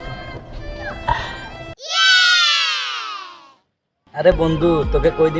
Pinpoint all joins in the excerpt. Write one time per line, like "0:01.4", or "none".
0:00.9